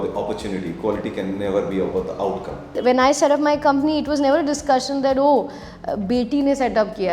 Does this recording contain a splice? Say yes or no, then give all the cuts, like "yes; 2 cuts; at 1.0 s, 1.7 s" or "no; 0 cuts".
yes; 1 cut; at 2.8 s